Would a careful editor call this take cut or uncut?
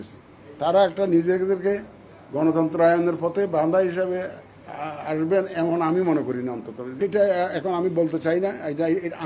cut